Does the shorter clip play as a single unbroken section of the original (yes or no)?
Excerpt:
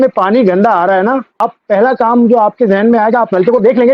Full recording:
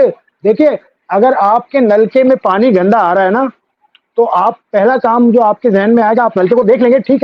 no